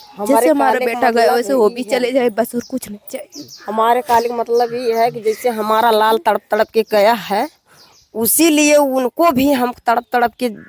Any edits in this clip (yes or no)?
no